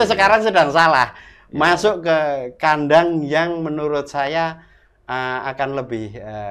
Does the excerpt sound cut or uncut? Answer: uncut